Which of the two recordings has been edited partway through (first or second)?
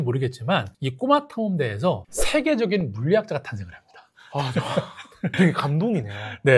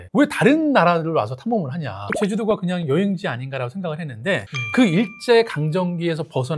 second